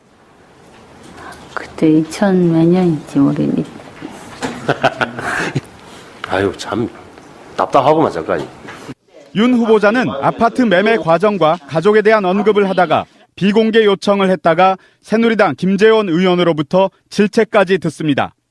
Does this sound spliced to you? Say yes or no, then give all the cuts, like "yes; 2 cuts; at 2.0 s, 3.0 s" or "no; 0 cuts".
no; 0 cuts